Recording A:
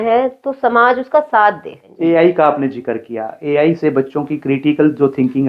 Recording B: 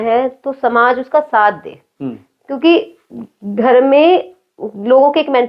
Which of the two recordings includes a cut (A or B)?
A